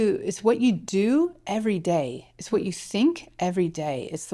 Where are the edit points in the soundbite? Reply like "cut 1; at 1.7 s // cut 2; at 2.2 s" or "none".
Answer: none

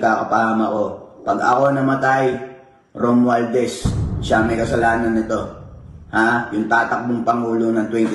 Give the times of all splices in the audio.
none

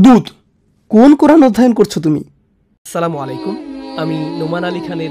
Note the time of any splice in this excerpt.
cut 1; at 2.7 s

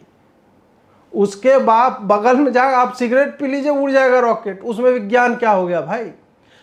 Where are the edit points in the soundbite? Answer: none

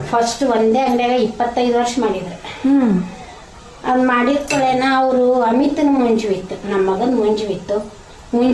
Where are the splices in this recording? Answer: none

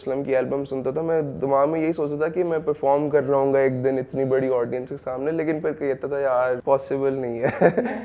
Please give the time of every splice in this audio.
cut 1; at 6.6 s

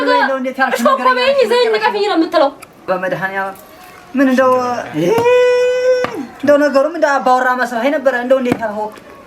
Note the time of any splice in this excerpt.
cut 1; at 2.9 s

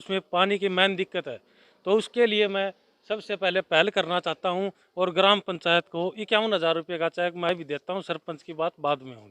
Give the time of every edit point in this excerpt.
none

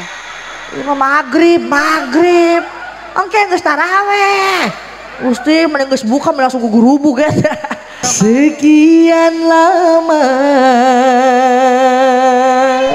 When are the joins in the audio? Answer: cut 1; at 8.0 s

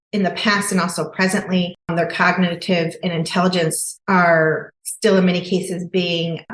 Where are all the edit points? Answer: cut 1; at 1.9 s

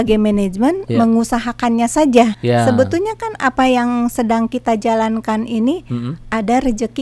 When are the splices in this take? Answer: cut 1; at 2.4 s

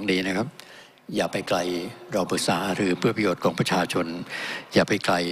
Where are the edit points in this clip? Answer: none

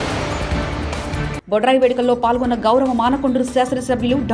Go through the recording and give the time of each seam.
none

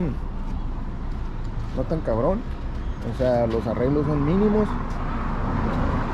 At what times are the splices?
none

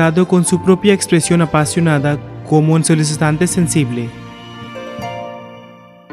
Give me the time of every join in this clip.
cut 1; at 2.3 s // cut 2; at 4.1 s

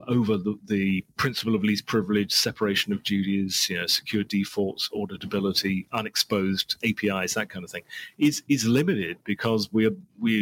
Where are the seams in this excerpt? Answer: cut 1; at 5.9 s // cut 2; at 6.8 s

